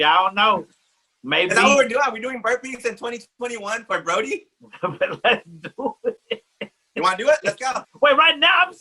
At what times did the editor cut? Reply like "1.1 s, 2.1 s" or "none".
7.8 s